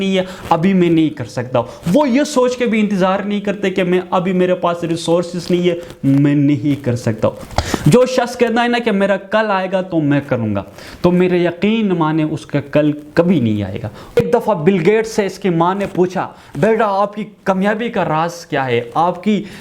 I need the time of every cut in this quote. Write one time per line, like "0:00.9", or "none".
0:07.4
0:14.2